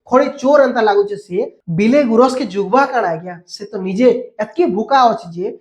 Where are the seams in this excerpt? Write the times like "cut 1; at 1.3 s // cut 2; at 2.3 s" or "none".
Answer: cut 1; at 1.6 s

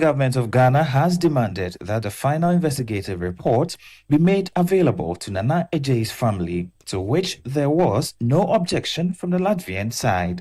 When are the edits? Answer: none

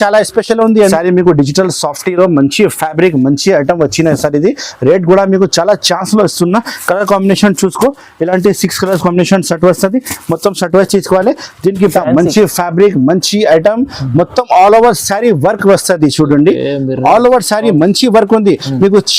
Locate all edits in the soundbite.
cut 1; at 0.9 s // cut 2; at 11.9 s

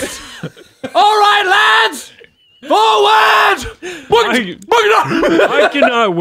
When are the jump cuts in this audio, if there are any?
none

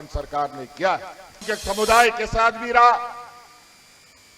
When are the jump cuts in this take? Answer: cut 1; at 1.3 s

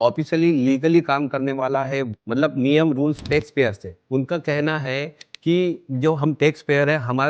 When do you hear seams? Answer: cut 1; at 2.2 s // cut 2; at 4.0 s

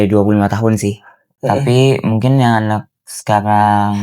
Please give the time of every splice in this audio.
cut 1; at 1.3 s

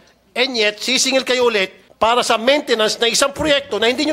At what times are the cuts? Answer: cut 1; at 1.8 s

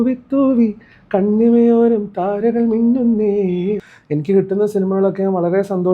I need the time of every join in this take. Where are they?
cut 1; at 3.8 s

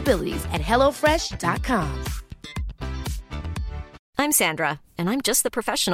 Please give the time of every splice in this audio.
cut 1; at 4.0 s

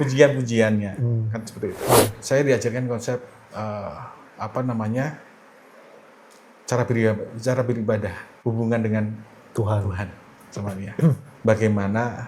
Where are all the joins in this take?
cut 1; at 2.2 s // cut 2; at 11.3 s

